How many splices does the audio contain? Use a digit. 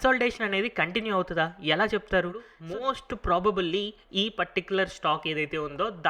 1